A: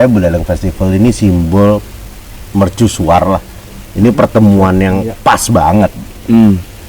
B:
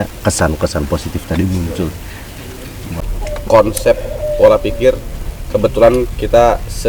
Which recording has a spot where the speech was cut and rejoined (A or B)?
B